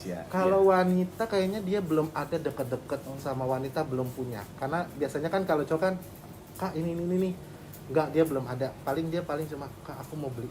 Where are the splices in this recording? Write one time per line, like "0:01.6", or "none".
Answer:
none